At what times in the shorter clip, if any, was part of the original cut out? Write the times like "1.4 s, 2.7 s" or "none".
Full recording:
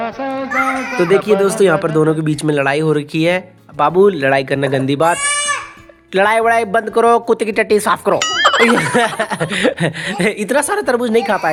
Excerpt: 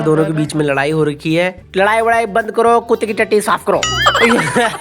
1.6 s